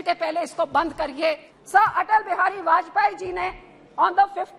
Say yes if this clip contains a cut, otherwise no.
yes